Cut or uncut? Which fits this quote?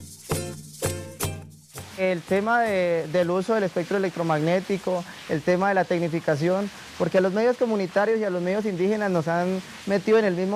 cut